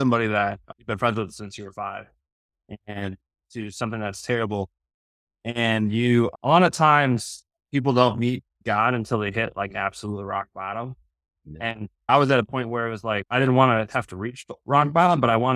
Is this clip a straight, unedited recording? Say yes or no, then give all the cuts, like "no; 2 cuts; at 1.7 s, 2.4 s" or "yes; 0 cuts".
yes; 0 cuts